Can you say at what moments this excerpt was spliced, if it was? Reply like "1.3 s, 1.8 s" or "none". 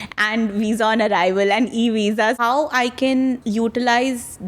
2.4 s, 3.4 s